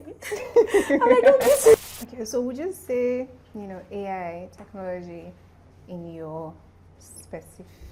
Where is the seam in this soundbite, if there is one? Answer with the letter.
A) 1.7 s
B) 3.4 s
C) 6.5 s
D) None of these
A